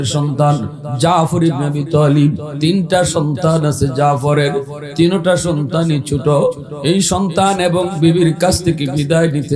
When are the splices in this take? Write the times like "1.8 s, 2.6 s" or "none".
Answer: 2.5 s